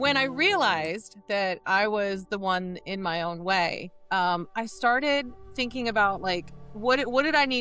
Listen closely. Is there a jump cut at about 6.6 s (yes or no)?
yes